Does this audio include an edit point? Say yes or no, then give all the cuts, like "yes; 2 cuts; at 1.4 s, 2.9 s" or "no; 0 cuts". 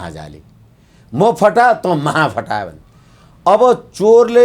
no; 0 cuts